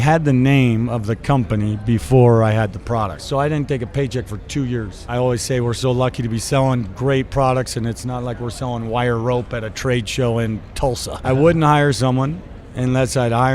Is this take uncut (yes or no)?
no